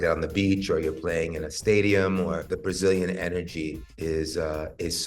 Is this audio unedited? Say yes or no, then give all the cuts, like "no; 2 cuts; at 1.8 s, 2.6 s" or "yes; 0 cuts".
no; 1 cut; at 2.5 s